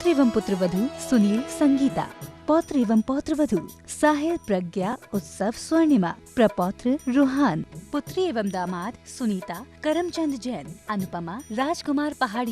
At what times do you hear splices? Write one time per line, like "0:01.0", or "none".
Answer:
none